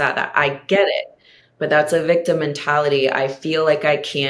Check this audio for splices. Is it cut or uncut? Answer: uncut